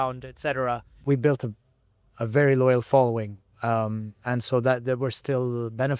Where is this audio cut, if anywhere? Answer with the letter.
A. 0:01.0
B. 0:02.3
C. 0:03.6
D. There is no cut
A